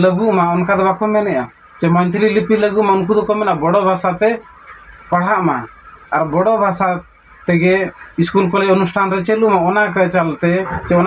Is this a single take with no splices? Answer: yes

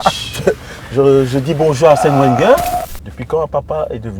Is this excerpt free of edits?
no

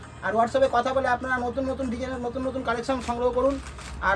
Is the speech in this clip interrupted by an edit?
no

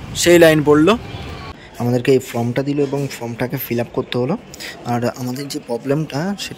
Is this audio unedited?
no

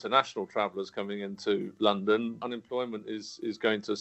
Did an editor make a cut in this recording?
yes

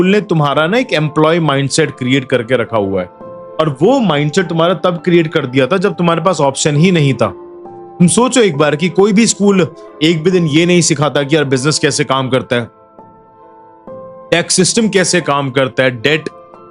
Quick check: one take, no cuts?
yes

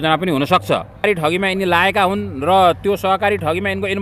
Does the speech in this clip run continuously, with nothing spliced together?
no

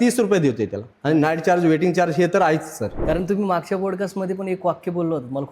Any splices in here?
yes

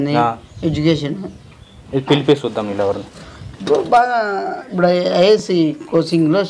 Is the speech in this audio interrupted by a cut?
yes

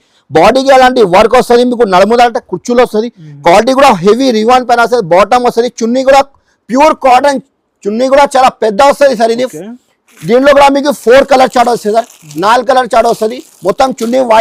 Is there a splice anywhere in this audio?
no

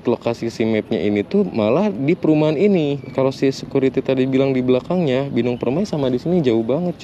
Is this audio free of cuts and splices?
no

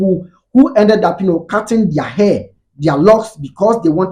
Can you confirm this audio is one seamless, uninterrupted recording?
yes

